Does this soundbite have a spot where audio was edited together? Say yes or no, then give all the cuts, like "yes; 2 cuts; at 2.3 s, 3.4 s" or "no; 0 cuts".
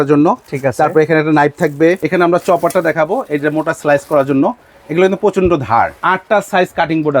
yes; 2 cuts; at 2.0 s, 6.0 s